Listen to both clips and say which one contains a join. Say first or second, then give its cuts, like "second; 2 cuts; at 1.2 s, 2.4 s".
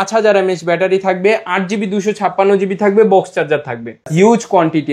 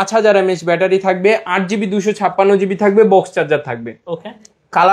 first; 1 cut; at 4.0 s